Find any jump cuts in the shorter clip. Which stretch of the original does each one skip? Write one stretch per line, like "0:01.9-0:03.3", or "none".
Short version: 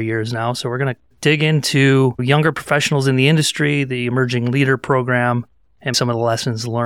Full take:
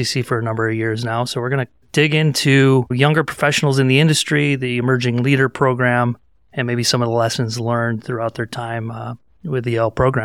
0:06.7-0:06.9